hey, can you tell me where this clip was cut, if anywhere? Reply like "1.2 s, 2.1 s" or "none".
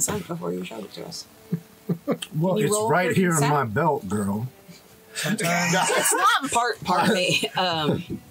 6.4 s